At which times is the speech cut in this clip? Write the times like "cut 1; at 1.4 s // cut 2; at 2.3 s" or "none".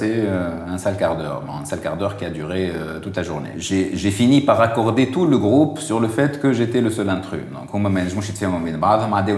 cut 1; at 3.5 s